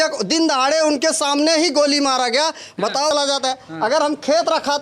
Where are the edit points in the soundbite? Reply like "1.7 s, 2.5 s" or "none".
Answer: 3.1 s